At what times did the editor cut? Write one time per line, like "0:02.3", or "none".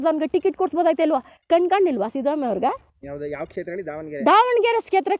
none